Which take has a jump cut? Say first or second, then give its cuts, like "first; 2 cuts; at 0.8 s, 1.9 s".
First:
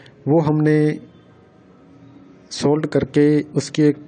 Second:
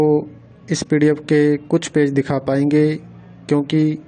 first; 1 cut; at 2.4 s